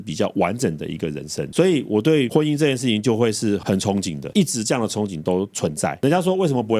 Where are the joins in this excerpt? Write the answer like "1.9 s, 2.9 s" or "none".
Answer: 4.2 s